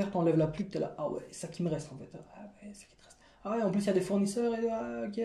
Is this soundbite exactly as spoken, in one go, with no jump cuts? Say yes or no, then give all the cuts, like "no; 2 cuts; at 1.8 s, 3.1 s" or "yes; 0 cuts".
yes; 0 cuts